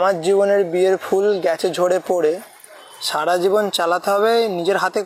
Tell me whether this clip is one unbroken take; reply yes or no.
yes